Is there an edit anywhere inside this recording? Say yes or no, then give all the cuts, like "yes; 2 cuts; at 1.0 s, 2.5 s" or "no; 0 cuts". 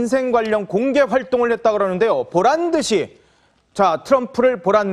yes; 1 cut; at 3.7 s